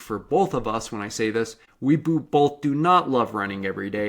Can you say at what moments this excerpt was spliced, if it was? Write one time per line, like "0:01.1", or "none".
0:01.6